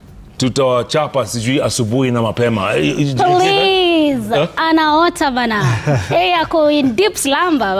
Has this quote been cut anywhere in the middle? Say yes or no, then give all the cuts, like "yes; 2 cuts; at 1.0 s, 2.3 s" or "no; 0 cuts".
no; 0 cuts